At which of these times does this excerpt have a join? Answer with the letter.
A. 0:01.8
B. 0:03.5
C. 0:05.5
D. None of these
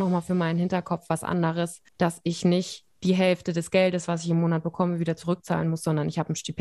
A